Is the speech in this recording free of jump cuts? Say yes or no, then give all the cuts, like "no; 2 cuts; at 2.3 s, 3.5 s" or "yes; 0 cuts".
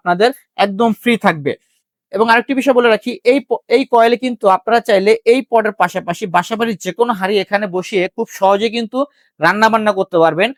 yes; 0 cuts